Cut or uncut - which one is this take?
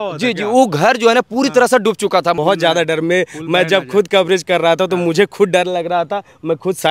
cut